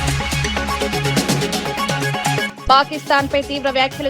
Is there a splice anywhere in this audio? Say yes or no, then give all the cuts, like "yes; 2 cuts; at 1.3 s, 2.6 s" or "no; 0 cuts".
yes; 1 cut; at 2.4 s